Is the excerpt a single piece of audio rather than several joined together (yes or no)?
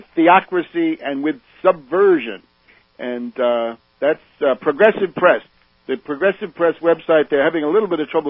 yes